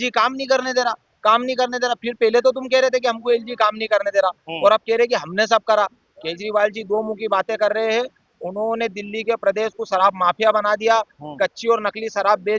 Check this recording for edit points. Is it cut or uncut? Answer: uncut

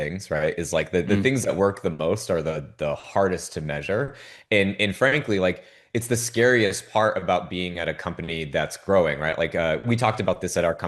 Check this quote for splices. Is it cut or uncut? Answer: uncut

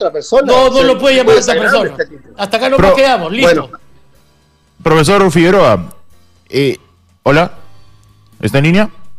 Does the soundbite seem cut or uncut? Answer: uncut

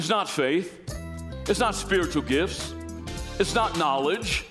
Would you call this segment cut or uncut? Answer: uncut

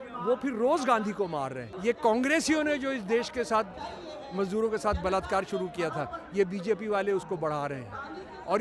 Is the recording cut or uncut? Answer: cut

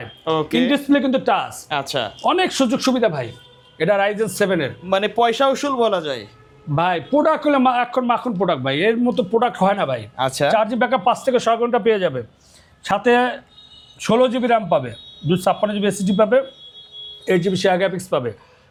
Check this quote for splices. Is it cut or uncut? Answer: uncut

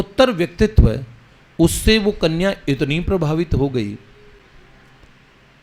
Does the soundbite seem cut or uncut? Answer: uncut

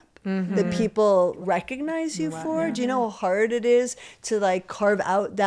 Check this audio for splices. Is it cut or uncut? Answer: cut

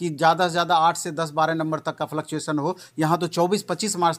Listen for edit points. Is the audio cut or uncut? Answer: uncut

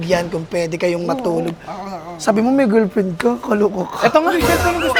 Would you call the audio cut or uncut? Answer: uncut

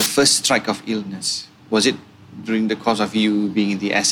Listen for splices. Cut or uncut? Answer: uncut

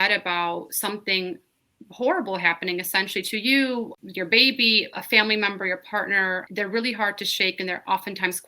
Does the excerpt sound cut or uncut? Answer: cut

